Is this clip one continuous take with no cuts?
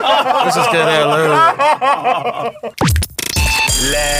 no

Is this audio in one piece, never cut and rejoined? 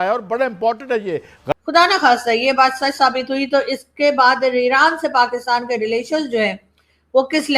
no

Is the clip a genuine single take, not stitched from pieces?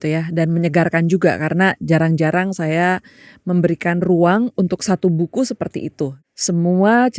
no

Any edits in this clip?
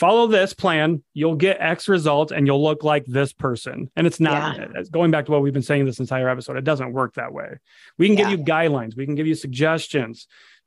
no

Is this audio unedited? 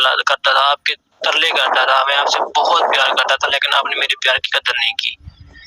yes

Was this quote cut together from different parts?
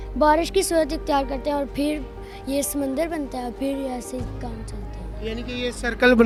no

